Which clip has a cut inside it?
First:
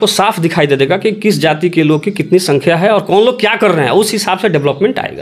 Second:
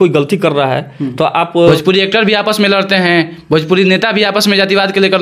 second; 1 cut; at 1.7 s

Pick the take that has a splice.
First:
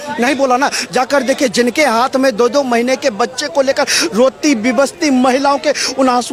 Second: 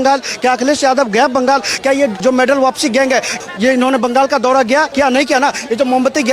second; 3 cuts; at 2.2 s, 3.4 s, 4.9 s

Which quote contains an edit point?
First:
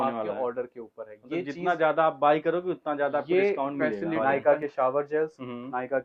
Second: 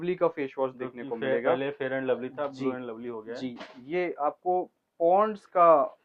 first; 1 cut; at 4.2 s

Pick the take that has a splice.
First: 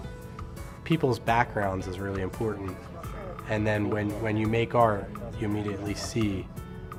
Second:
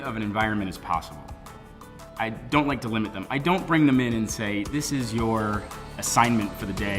second; 1 cut; at 5.9 s

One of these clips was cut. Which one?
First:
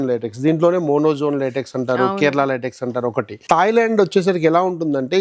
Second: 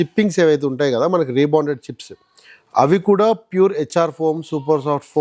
first; 1 cut; at 3.3 s

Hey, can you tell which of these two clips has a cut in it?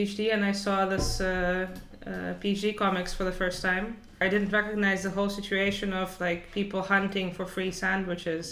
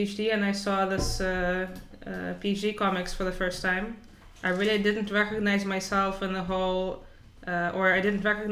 first; 1 cut; at 4.2 s

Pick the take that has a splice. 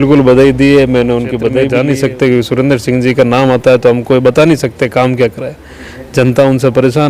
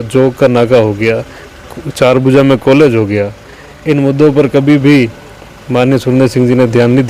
first; 1 cut; at 1.6 s

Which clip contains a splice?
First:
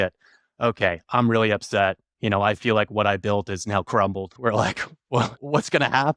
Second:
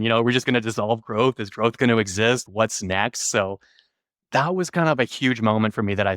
first; 1 cut; at 4.3 s

